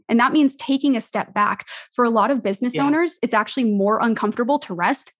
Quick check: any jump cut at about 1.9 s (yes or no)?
no